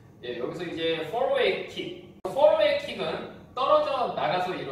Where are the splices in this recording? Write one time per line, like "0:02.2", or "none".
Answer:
0:02.9